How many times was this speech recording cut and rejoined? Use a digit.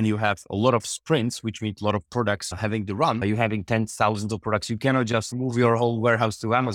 0